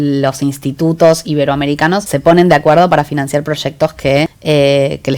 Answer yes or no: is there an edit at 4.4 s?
yes